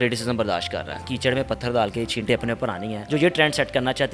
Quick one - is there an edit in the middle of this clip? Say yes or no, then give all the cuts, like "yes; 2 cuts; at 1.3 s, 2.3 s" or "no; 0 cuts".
yes; 2 cuts; at 1.1 s, 2.9 s